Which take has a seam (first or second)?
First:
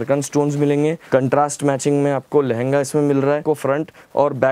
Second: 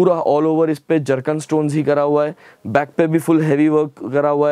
first